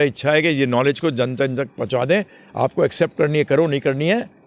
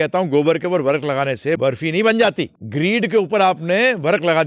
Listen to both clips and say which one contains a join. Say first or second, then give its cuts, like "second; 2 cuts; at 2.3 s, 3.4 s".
second; 2 cuts; at 1.6 s, 2.6 s